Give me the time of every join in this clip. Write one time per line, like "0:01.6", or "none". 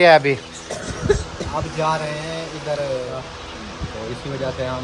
0:03.1